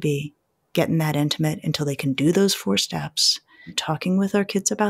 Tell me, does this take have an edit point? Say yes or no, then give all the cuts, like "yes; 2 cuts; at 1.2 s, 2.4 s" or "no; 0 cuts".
yes; 1 cut; at 3.8 s